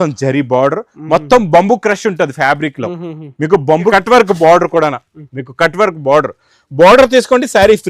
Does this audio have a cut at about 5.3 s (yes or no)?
no